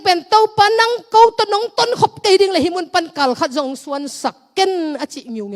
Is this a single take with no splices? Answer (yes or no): yes